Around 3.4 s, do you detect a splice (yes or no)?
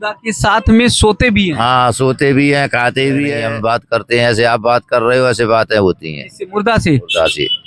yes